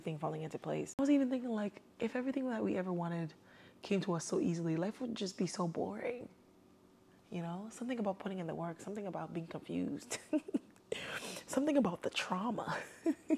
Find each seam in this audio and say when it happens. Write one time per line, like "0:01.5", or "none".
0:01.0